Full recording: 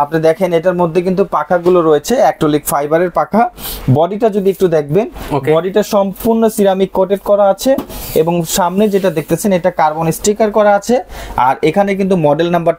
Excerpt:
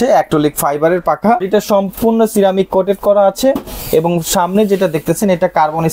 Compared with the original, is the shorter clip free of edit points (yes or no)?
no